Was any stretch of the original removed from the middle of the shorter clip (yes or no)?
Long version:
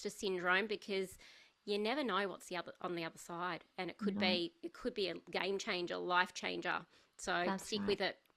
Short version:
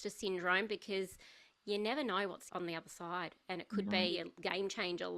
yes